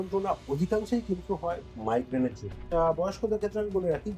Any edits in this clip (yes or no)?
yes